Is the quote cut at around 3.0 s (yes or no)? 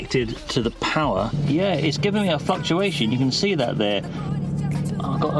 no